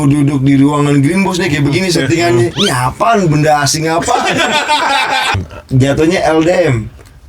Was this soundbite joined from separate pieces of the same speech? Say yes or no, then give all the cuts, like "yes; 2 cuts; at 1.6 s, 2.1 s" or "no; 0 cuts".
yes; 1 cut; at 5.4 s